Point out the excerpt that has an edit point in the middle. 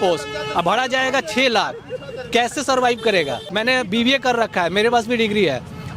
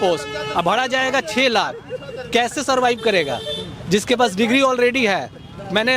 first; 1 cut; at 3.4 s

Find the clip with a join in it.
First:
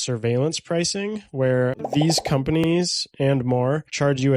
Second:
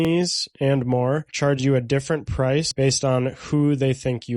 second; 1 cut; at 2.7 s

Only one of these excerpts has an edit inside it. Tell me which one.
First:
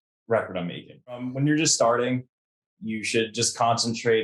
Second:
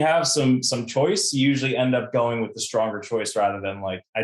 first; 1 cut; at 1.3 s

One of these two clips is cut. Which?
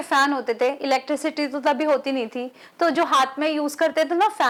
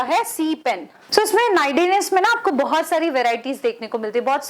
second; 1 cut; at 0.9 s

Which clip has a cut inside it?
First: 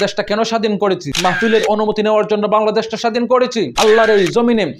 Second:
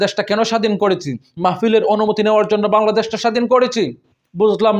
first; 2 cuts; at 1.2 s, 3.8 s

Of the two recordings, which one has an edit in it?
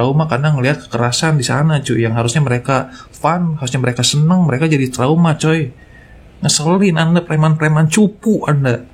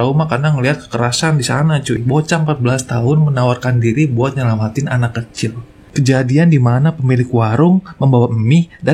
second; 2 cuts; at 2.0 s, 5.8 s

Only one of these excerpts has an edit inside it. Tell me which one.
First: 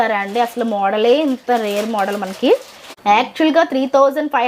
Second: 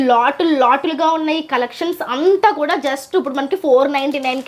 first; 1 cut; at 2.9 s

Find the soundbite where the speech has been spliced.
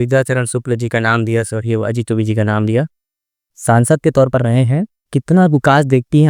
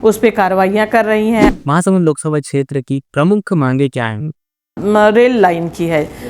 second; 2 cuts; at 1.5 s, 4.8 s

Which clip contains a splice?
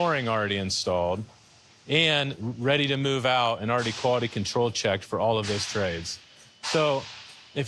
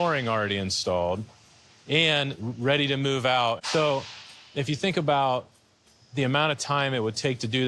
second; 1 cut; at 3.6 s

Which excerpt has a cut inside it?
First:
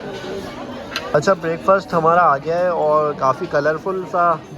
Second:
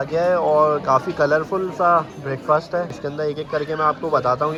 first; 1 cut; at 1.1 s

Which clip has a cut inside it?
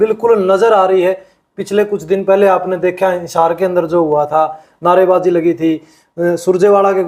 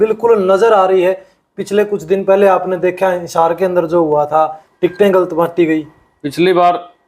second; 1 cut; at 4.6 s

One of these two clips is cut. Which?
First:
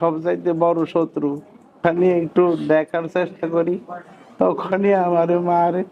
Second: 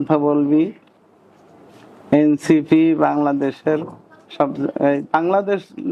first; 1 cut; at 1.8 s

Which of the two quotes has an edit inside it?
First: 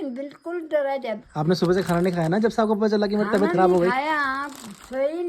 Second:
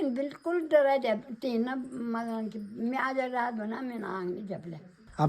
first; 1 cut; at 1.3 s

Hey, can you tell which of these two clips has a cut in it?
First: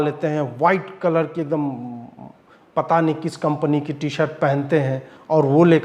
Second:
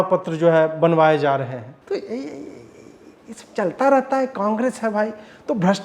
second; 1 cut; at 1.7 s

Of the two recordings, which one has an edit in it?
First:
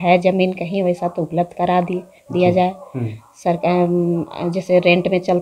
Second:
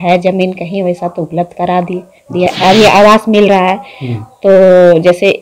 second; 1 cut; at 2.5 s

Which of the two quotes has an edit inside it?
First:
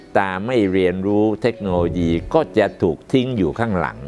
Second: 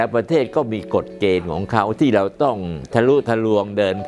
second; 1 cut; at 2.8 s

